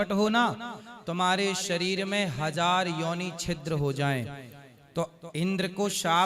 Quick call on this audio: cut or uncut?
uncut